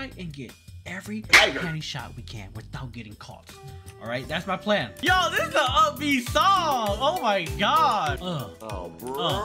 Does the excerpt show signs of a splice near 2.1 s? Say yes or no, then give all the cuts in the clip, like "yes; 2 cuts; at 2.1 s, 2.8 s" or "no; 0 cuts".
no; 1 cut; at 4.9 s